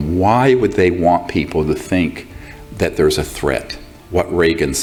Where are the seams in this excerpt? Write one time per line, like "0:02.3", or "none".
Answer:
none

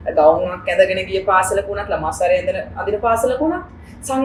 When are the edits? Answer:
none

